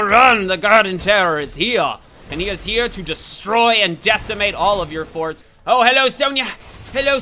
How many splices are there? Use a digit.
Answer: 1